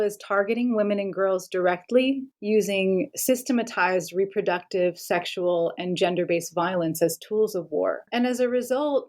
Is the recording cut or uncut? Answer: cut